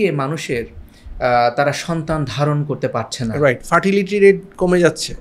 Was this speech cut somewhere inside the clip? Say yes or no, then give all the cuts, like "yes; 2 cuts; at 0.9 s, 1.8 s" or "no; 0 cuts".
no; 0 cuts